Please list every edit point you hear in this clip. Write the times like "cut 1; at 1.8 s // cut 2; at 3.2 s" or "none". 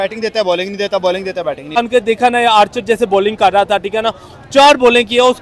cut 1; at 1.8 s